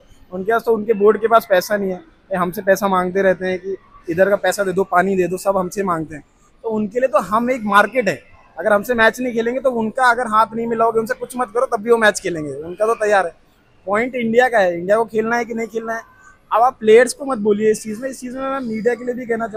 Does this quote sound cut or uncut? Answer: uncut